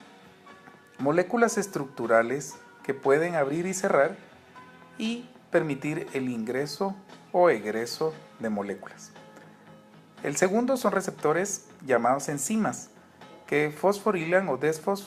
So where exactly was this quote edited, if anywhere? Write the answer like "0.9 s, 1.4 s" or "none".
3.8 s